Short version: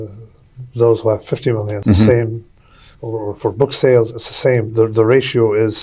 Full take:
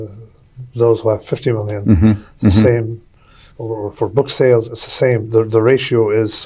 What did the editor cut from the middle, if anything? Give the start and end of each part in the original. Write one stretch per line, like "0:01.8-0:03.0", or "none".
0:01.7-0:02.3